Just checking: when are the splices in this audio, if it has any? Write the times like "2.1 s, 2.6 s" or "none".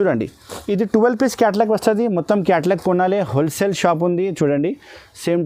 none